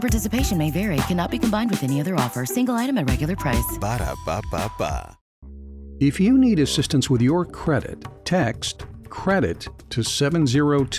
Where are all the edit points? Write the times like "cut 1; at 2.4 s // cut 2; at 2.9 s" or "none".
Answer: cut 1; at 5.4 s